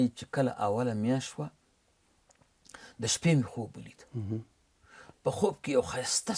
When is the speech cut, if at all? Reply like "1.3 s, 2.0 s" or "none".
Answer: none